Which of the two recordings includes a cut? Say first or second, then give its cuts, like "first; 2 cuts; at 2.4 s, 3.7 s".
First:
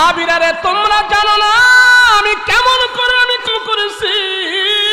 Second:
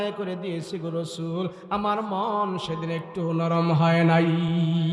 first; 1 cut; at 3.5 s